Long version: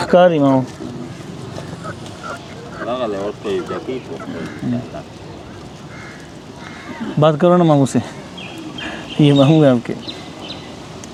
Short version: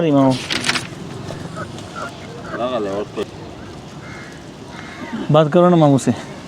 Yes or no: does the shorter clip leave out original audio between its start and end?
yes